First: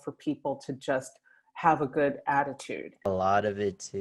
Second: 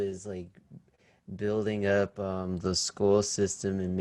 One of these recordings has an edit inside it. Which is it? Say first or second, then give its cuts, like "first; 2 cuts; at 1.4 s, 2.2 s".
first; 1 cut; at 3.0 s